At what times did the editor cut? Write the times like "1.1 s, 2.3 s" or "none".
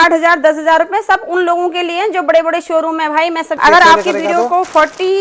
3.6 s